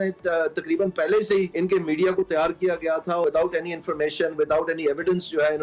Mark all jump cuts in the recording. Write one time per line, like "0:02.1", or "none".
0:01.5
0:03.2